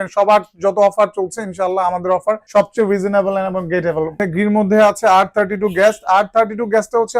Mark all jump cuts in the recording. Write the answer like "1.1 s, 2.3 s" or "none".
2.4 s, 4.2 s